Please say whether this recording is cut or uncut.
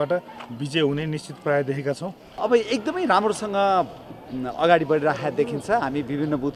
cut